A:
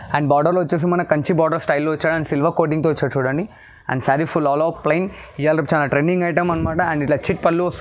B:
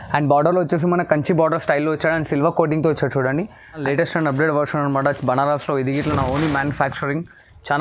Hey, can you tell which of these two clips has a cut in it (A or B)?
B